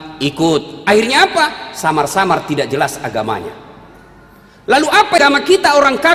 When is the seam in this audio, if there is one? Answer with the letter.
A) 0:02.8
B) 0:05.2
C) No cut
B